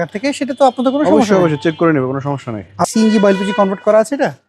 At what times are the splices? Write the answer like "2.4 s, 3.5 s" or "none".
2.9 s